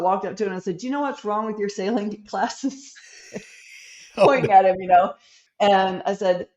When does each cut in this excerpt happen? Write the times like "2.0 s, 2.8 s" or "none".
5.4 s